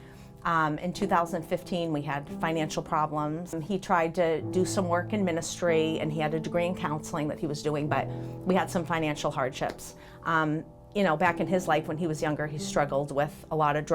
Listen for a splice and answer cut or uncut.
cut